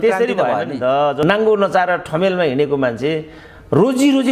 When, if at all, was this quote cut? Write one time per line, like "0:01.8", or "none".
0:01.2